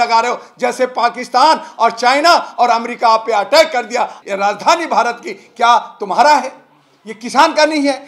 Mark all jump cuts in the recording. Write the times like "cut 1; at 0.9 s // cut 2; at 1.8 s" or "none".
cut 1; at 4.2 s